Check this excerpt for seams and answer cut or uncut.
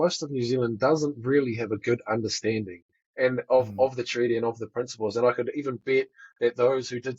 uncut